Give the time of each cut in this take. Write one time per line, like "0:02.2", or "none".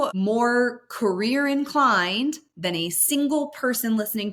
none